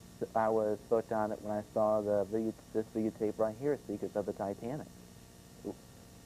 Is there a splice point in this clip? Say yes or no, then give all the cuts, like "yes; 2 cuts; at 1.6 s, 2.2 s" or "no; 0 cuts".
yes; 1 cut; at 4.7 s